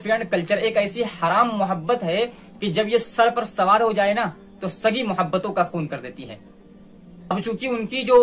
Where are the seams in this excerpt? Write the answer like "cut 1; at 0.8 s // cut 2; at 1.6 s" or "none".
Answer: cut 1; at 7.3 s